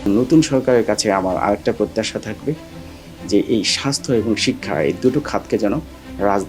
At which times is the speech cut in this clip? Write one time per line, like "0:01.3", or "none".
none